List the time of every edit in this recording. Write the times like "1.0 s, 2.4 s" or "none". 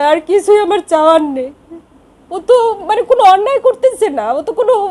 none